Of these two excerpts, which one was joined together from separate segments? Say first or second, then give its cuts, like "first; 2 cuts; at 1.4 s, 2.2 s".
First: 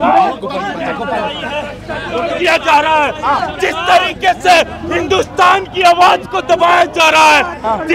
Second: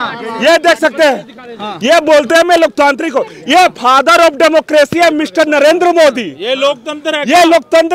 first; 1 cut; at 2.3 s